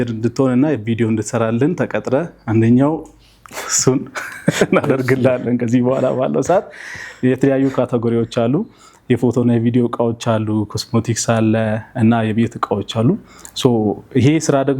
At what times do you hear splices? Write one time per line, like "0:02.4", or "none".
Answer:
none